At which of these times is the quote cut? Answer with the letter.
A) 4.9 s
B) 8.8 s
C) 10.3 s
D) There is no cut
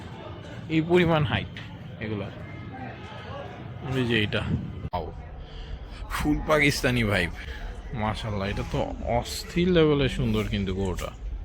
A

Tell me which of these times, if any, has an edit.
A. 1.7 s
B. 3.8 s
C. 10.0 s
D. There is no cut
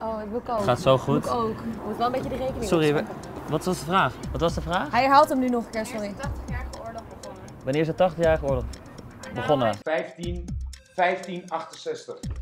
A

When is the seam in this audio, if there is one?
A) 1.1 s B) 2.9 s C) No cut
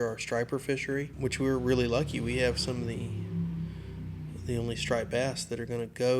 A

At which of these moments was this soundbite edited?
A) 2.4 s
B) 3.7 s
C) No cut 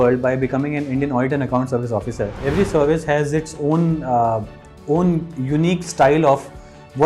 A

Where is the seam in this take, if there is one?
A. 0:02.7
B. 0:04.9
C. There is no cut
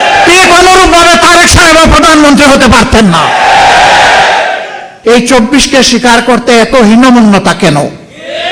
B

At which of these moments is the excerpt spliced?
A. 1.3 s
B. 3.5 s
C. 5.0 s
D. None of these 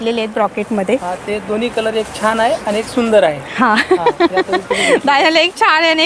D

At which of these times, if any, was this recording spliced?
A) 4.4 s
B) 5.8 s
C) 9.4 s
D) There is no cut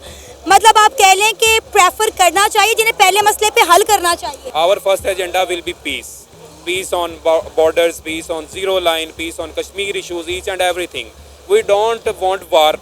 A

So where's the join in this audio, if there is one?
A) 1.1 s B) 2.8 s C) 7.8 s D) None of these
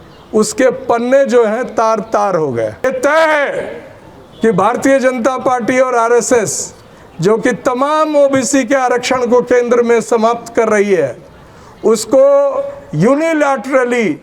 B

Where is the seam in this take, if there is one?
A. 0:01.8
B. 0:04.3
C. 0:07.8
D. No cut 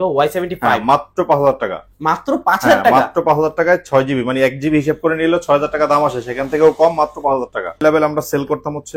C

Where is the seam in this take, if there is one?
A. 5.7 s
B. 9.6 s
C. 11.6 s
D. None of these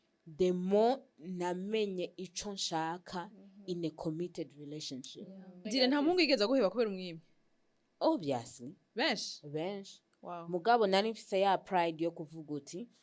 A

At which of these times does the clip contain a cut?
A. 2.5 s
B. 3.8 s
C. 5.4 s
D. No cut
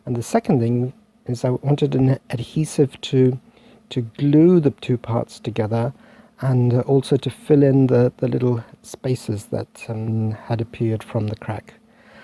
C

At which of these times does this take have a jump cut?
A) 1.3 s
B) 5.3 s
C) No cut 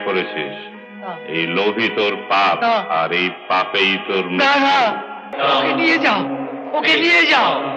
B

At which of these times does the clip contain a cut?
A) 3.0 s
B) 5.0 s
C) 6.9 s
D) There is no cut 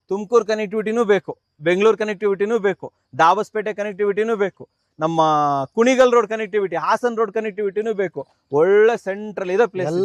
D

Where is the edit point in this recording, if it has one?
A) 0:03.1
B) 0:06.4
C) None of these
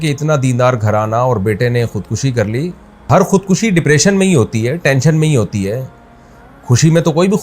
A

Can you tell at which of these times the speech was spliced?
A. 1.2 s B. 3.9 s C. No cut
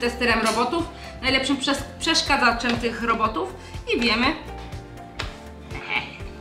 C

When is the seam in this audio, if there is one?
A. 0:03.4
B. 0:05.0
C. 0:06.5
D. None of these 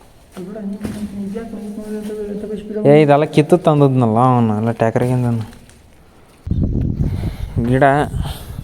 C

